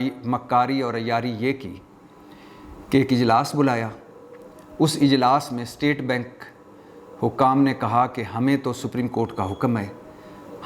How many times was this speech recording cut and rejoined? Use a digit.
0